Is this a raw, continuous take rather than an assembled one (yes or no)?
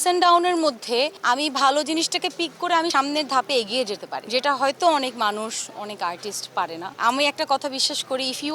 no